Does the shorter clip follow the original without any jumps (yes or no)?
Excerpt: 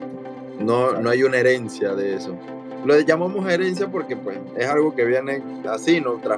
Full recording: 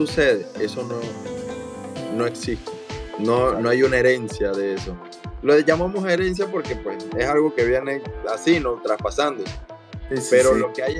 yes